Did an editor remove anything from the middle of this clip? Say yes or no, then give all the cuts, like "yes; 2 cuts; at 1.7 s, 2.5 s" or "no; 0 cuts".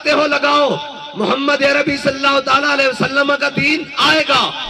no; 0 cuts